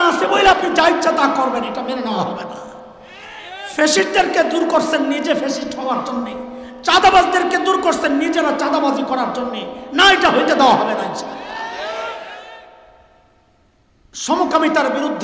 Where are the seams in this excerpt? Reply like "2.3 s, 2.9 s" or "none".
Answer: 13.2 s